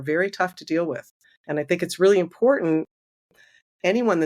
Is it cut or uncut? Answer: uncut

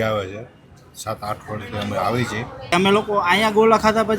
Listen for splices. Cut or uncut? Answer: cut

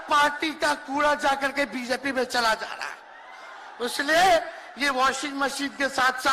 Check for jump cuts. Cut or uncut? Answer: uncut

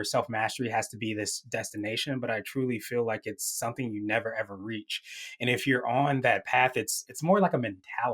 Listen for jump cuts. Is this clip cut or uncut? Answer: cut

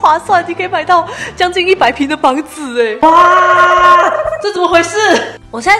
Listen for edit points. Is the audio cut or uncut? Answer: cut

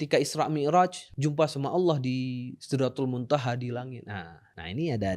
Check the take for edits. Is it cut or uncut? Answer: uncut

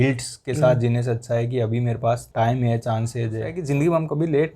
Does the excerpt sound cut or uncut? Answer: cut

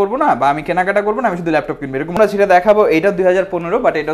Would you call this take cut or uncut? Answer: cut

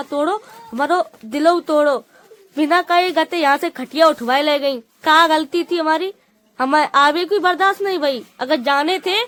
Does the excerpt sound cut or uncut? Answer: uncut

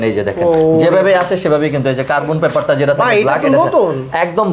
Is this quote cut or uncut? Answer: uncut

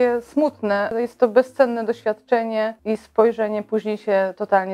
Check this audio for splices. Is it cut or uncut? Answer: cut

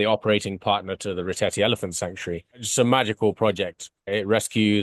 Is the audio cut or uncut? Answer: cut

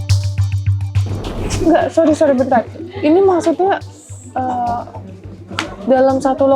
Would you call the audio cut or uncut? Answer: cut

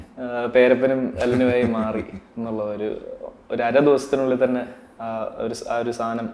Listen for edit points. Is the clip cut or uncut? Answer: uncut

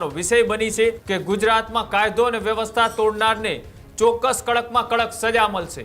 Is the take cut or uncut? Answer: cut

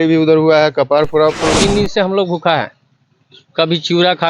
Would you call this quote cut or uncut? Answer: cut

